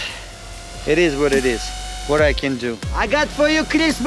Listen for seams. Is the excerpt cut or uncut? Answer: cut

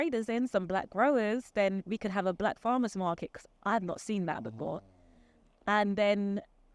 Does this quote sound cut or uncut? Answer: uncut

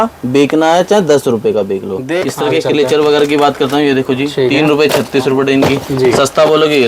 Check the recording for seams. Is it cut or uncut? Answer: cut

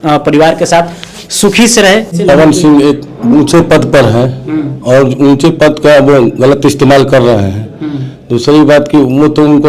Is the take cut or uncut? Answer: cut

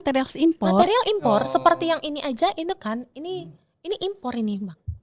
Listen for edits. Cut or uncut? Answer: uncut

